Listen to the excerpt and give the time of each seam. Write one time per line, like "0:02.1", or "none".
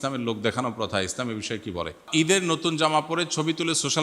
0:02.1

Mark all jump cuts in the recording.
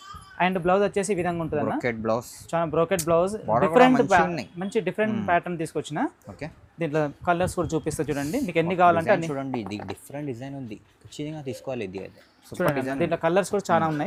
none

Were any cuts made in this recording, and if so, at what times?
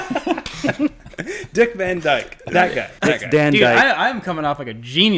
0:02.9

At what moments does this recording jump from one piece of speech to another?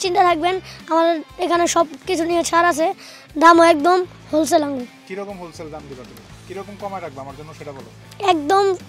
none

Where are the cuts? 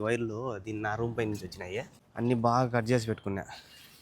0:02.0

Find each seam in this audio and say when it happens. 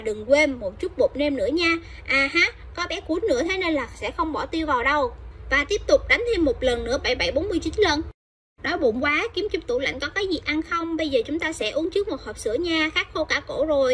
0:08.2

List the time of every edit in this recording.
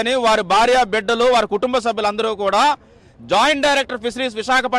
0:01.7

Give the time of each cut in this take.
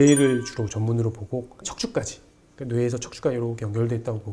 0:01.7

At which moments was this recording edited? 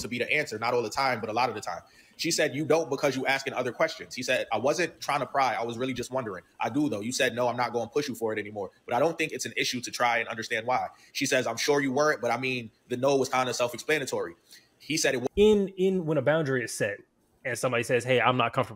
0:15.2

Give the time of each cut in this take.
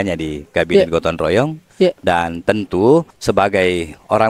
0:03.1

